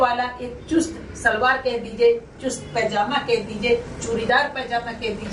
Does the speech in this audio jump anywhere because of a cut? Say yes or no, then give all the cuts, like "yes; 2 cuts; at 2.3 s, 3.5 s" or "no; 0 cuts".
no; 0 cuts